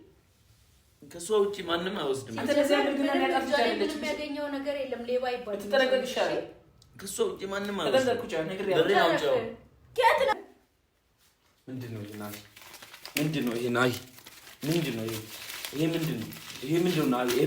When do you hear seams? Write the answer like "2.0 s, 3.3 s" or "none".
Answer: 10.3 s

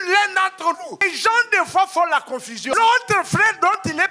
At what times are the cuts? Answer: 1.0 s, 2.6 s

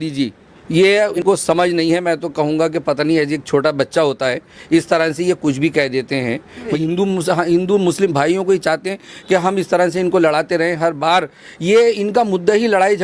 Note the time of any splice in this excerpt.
1.2 s, 6.7 s

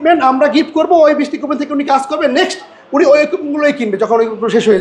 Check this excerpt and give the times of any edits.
none

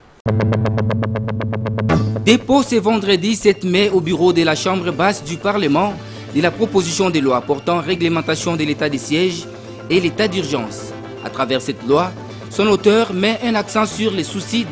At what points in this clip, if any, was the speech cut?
2.2 s

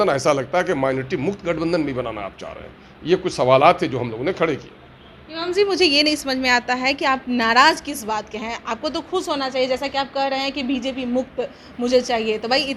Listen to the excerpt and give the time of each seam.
none

